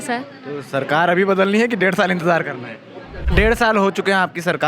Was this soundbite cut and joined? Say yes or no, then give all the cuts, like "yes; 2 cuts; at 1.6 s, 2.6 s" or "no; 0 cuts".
yes; 1 cut; at 3.3 s